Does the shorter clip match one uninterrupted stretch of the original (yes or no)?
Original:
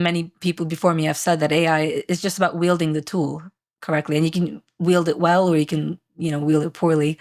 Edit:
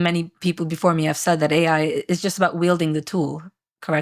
yes